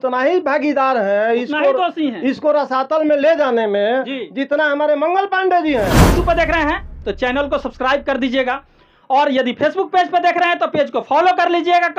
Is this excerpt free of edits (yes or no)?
no